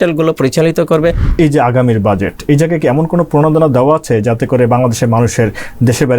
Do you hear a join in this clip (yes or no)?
yes